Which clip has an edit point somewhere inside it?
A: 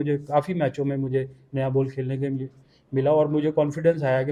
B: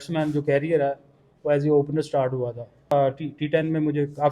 B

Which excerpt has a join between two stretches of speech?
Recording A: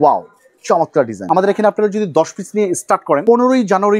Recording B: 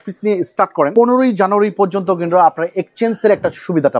A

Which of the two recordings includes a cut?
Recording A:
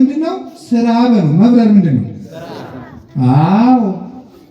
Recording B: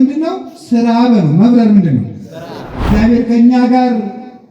B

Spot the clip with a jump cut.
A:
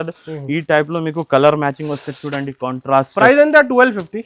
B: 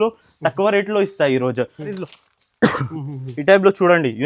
B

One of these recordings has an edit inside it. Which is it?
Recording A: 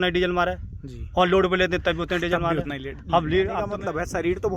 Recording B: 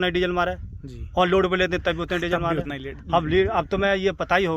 A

